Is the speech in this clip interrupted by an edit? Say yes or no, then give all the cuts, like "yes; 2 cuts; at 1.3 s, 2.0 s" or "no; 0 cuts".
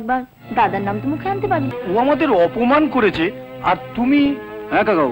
yes; 1 cut; at 1.8 s